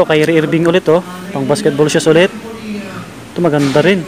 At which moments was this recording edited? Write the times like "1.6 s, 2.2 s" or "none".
none